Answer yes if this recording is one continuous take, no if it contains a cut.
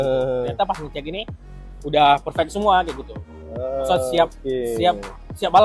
yes